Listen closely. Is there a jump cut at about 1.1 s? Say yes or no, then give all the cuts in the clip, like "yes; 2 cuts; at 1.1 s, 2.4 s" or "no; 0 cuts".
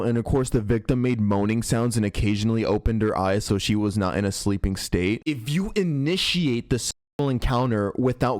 no; 1 cut; at 3.4 s